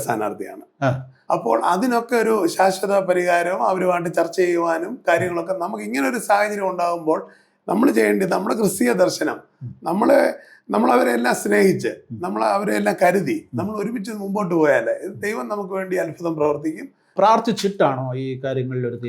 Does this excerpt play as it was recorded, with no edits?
no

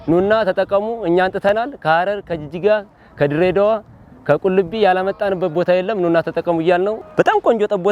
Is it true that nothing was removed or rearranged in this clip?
no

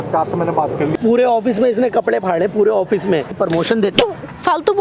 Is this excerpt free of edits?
no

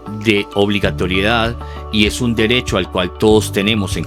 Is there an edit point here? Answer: no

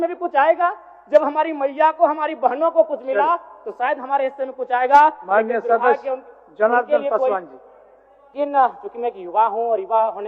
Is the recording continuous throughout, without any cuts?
no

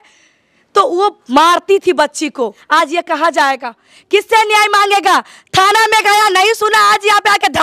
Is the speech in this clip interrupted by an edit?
yes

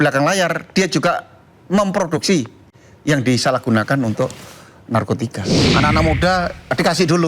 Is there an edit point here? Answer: yes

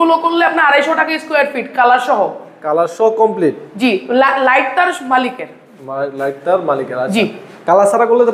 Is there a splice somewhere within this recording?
no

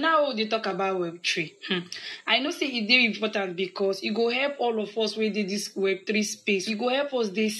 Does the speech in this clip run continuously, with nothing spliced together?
no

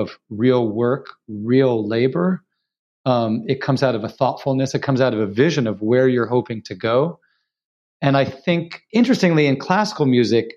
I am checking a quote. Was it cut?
yes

